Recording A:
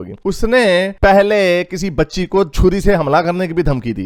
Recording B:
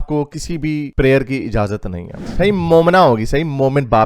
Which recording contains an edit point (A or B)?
B